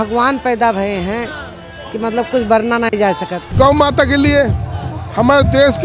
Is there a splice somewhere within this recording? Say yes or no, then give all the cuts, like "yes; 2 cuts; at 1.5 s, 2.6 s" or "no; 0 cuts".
yes; 1 cut; at 3.4 s